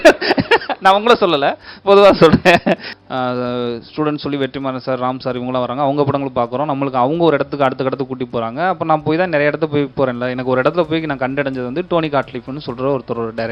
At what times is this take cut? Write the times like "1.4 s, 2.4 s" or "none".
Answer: 2.9 s